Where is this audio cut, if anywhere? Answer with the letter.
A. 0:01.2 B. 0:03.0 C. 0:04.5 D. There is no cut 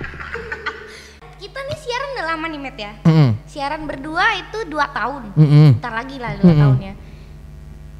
A